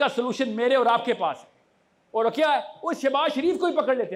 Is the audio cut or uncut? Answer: uncut